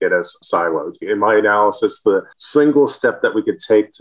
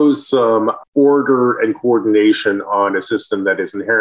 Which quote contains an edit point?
first; 2 cuts; at 1.0 s, 2.4 s

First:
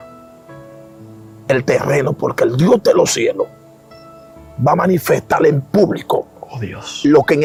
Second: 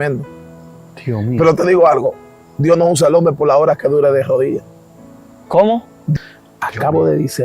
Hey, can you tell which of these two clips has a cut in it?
second; 1 cut; at 6.2 s

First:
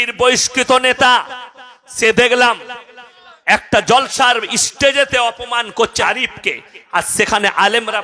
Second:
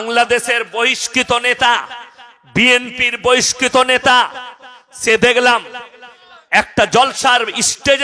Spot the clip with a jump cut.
first; 1 cut; at 6.0 s

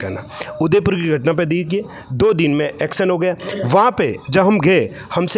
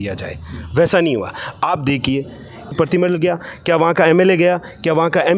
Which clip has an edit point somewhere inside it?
second; 1 cut; at 2.7 s

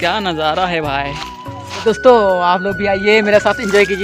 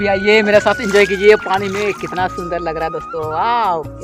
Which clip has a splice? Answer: first; 1 cut; at 1.8 s

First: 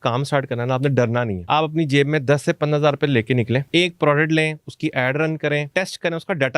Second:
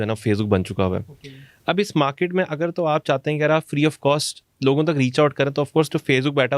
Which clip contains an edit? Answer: first; 3 cuts; at 1.4 s, 3.6 s, 5.7 s

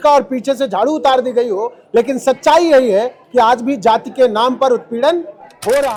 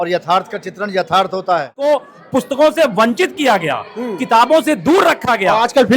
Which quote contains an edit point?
second; 1 cut; at 1.7 s

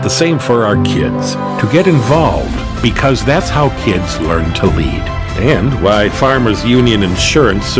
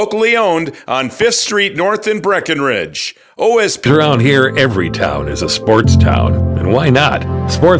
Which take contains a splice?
second; 1 cut; at 3.8 s

